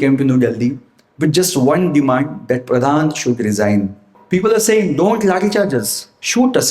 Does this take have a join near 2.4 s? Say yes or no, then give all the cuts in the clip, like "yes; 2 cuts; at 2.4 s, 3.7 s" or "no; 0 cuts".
no; 1 cut; at 4.1 s